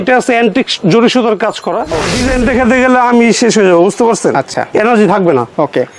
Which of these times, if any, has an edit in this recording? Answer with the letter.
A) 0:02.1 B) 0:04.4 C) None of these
A